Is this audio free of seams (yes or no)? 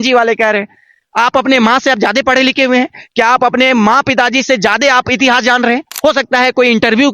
no